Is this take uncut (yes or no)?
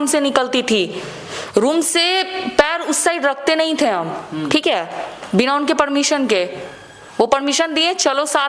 yes